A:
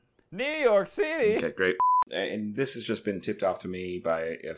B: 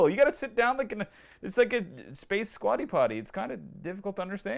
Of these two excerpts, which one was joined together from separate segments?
A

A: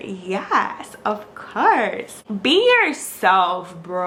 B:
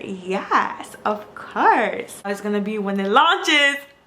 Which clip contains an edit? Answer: B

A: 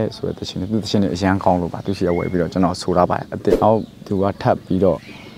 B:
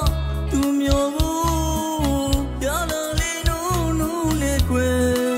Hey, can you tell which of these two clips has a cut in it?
A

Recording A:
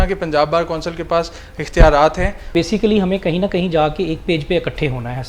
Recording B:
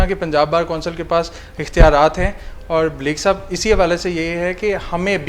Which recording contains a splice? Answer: A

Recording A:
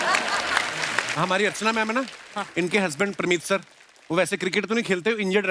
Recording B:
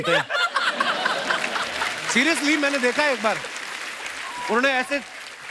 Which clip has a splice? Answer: A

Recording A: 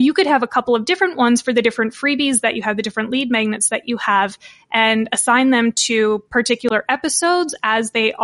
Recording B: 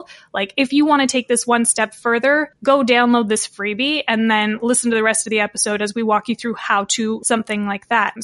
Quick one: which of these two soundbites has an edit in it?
B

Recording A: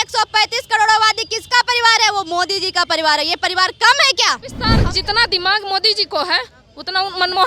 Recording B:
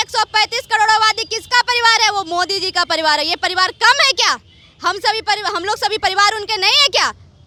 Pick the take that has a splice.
A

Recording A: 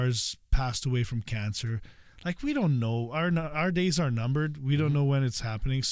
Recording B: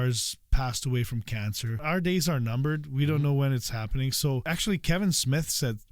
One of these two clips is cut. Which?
B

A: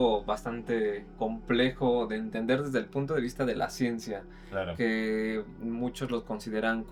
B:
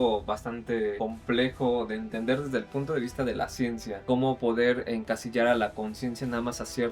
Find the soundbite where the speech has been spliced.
B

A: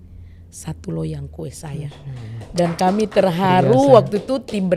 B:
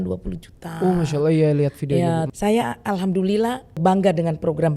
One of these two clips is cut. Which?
B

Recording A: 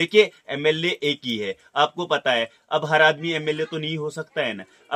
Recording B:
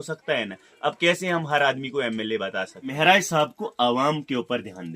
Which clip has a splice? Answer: B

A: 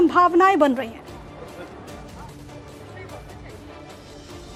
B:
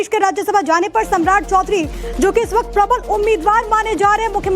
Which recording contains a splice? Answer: B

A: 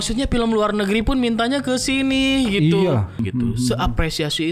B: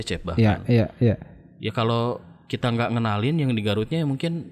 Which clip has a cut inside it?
A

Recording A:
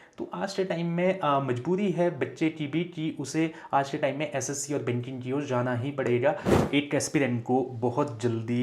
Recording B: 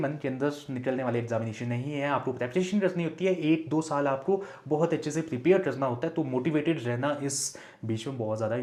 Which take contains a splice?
A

